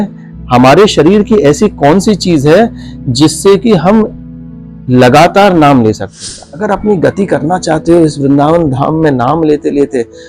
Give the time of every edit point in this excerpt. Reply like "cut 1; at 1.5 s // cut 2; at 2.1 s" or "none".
cut 1; at 6.5 s